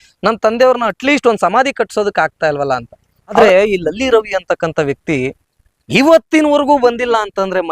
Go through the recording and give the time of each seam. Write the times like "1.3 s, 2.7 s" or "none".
3.4 s